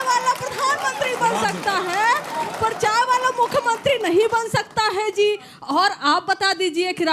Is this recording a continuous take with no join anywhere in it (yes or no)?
yes